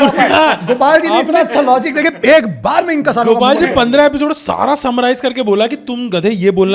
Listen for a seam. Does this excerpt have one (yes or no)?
no